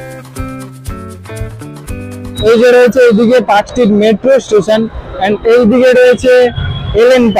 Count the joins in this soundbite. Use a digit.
1